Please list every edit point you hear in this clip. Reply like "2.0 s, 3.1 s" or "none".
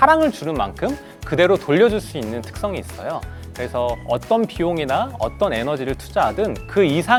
none